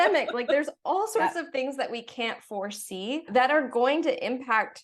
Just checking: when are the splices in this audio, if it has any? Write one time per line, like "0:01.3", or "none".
0:03.3

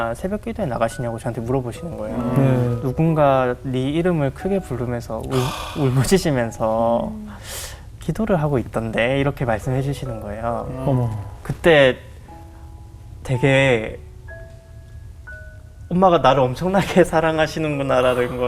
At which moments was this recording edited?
0:02.8

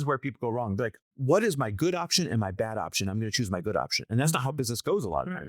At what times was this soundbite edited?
0:01.0

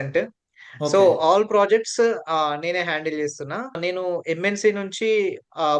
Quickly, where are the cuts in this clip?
0:03.7

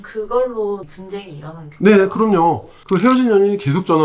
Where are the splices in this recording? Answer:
none

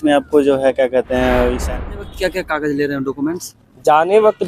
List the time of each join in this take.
0:01.7

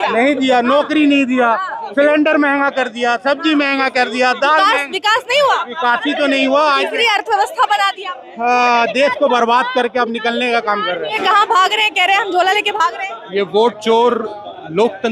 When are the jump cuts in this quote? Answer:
0:11.2

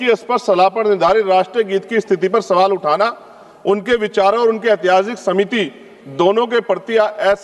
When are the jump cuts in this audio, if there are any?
none

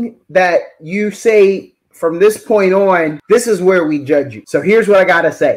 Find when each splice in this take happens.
0:03.2
0:04.4

